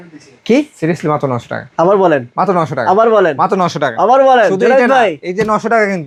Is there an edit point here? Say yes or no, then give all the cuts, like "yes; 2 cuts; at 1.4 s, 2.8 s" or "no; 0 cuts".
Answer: no; 0 cuts